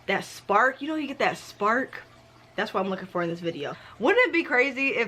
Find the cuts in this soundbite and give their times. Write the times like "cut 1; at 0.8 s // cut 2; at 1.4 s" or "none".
cut 1; at 3.7 s